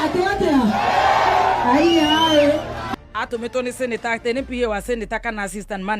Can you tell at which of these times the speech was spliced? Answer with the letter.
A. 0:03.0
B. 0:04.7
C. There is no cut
A